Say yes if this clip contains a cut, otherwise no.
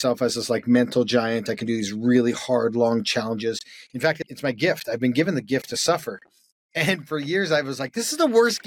yes